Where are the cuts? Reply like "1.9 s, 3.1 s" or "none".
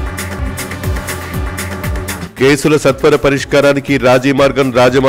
2.2 s

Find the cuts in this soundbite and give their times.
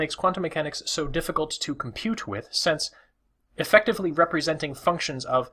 4.1 s

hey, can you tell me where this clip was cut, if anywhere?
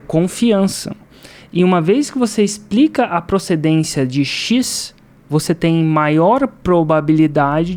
none

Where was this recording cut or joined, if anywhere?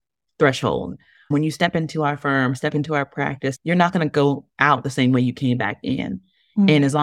1.3 s, 3.6 s

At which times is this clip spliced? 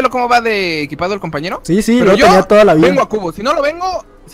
1.6 s, 2.9 s

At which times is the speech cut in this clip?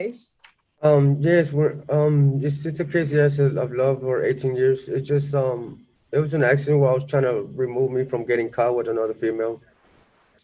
none

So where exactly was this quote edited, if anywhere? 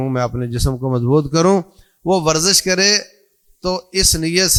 none

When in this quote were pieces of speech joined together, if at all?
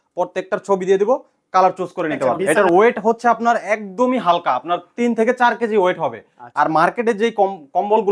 2.4 s

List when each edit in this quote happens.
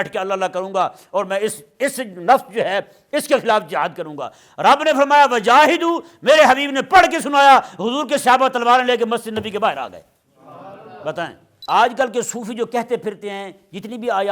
11.5 s

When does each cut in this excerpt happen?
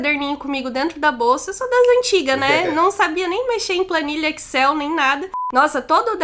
5.3 s

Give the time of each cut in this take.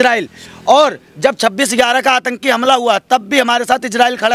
none

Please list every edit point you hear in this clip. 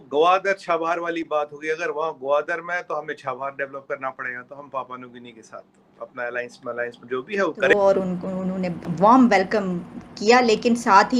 7.7 s

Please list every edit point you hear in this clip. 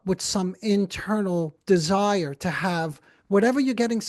none

